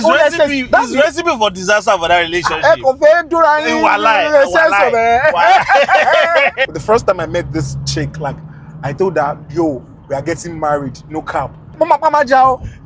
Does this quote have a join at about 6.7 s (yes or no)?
yes